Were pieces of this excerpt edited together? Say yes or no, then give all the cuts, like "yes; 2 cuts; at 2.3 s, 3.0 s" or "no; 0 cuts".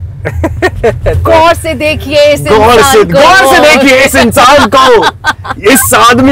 no; 0 cuts